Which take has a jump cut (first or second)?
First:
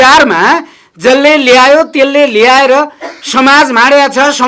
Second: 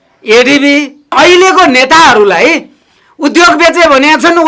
second